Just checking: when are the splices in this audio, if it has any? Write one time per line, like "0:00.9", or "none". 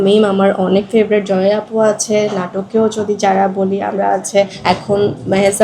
0:04.6